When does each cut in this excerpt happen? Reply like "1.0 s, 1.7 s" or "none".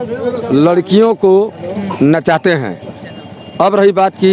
none